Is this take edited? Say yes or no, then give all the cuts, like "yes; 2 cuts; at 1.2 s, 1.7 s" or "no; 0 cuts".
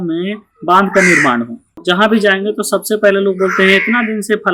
yes; 1 cut; at 1.8 s